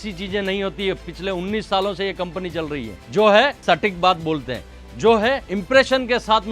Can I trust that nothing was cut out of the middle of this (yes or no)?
no